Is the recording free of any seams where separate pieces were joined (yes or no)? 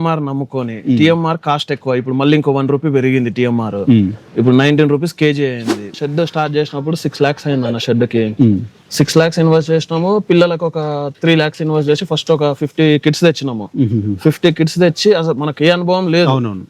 no